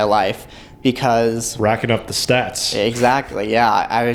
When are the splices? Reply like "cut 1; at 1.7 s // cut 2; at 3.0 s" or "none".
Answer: none